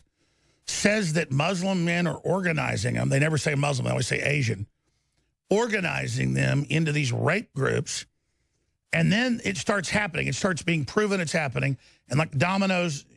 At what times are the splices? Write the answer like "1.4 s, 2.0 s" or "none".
none

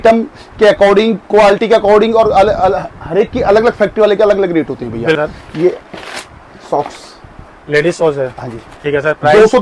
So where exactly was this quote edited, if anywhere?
5.2 s

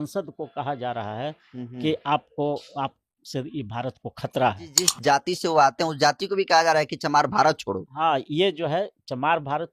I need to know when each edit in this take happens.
4.9 s

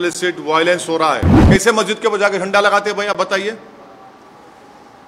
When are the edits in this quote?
1.3 s

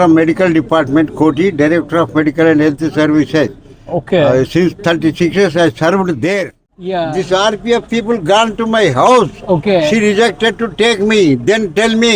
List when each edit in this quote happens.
6.7 s

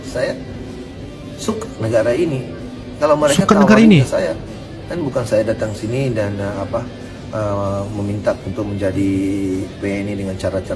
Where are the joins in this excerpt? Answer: none

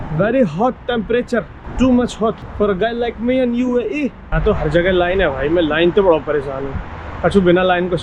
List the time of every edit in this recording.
1.6 s, 2.5 s, 4.4 s

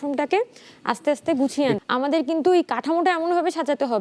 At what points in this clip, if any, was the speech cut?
1.8 s

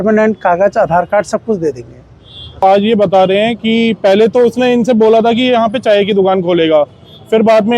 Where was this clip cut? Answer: 2.6 s

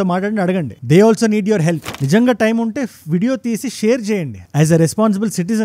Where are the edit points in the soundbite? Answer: 1.9 s

